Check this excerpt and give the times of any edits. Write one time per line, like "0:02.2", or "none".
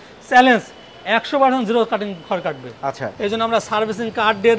0:03.1